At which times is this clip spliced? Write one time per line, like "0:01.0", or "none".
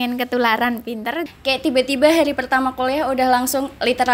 0:01.2